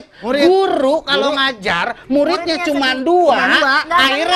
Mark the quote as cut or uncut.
uncut